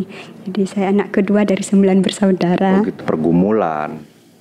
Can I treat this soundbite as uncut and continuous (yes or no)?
no